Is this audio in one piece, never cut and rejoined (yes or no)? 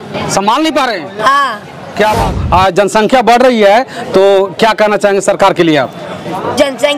no